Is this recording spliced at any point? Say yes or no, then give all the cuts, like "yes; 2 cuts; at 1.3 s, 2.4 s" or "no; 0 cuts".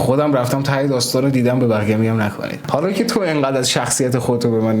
yes; 1 cut; at 2.5 s